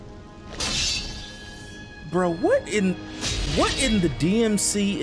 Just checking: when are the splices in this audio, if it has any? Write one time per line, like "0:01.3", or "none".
none